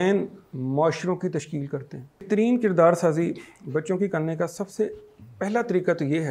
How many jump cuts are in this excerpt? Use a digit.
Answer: 1